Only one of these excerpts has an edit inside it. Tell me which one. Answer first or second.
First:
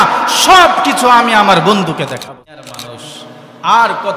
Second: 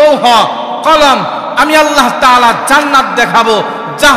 first